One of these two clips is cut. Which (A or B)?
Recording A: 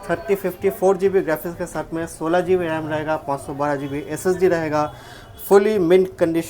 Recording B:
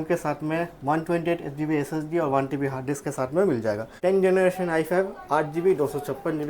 B